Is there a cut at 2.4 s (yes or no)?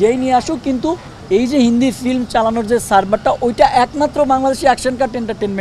no